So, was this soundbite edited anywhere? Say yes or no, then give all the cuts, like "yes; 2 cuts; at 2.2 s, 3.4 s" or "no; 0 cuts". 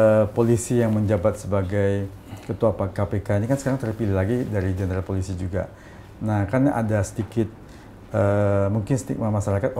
no; 0 cuts